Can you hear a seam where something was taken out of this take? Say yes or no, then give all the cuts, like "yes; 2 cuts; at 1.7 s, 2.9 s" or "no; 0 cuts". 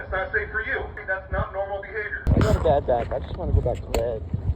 yes; 2 cuts; at 1.0 s, 2.3 s